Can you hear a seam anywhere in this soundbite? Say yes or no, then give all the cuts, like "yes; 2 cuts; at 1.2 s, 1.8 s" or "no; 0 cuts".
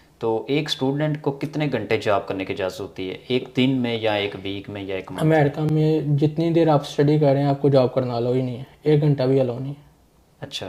no; 0 cuts